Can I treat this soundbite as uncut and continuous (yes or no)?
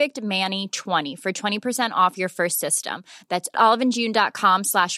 no